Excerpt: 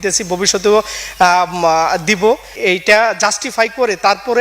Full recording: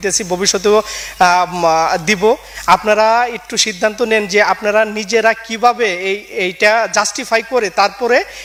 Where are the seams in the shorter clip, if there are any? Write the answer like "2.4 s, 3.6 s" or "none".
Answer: 2.5 s